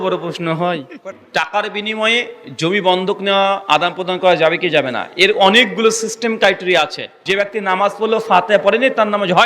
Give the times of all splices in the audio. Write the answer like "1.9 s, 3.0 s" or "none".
1.0 s, 7.2 s